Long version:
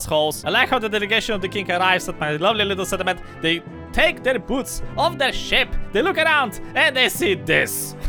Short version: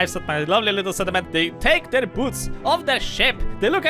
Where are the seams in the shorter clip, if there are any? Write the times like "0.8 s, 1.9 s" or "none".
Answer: 1.4 s